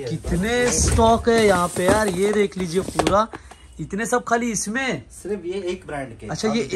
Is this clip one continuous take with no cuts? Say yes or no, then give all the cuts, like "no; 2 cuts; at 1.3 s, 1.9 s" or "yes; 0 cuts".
yes; 0 cuts